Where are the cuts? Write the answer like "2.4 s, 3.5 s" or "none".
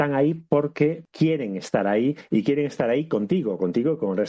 1.1 s